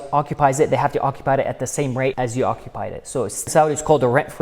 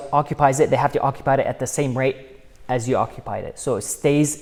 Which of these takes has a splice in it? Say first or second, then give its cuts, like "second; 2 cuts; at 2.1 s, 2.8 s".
first; 2 cuts; at 2.1 s, 3.5 s